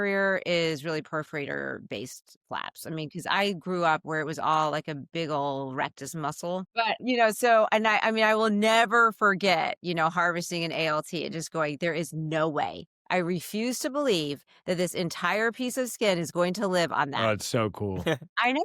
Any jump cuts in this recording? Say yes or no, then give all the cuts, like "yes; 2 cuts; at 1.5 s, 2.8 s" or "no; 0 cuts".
yes; 1 cut; at 6.9 s